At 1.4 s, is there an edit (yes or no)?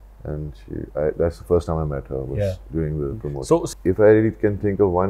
no